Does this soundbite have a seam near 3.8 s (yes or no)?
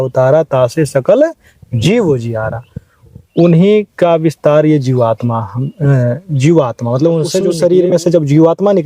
no